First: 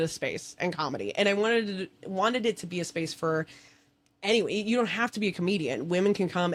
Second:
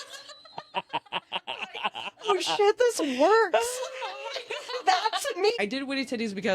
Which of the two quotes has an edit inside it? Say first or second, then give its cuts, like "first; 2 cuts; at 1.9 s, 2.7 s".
second; 1 cut; at 5.6 s